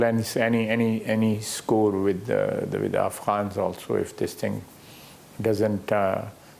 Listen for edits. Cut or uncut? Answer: uncut